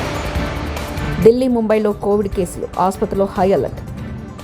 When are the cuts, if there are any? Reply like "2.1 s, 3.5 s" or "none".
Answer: 1.0 s